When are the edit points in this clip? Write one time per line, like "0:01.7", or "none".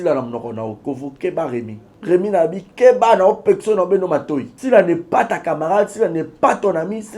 0:01.8
0:04.5